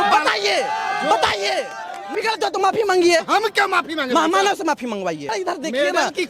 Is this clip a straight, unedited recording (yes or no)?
no